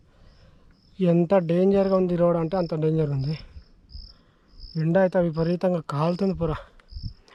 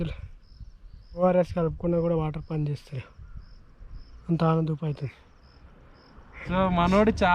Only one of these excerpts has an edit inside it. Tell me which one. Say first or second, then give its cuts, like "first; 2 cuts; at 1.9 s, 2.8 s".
second; 2 cuts; at 1.2 s, 6.4 s